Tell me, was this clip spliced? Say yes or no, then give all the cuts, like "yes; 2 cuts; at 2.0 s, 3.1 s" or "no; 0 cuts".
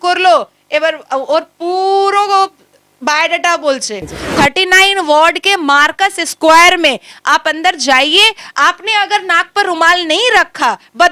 yes; 1 cut; at 4.2 s